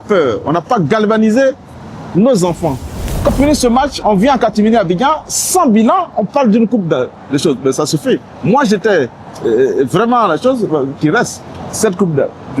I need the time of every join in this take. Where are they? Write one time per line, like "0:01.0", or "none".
0:03.3